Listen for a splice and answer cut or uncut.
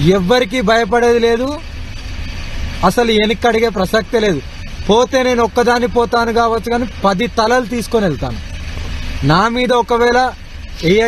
uncut